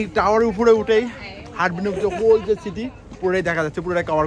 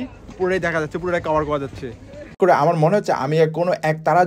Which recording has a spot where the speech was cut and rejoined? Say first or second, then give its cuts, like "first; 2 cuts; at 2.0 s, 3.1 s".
second; 1 cut; at 2.3 s